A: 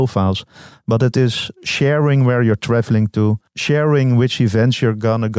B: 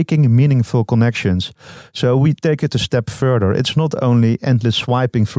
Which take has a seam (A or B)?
A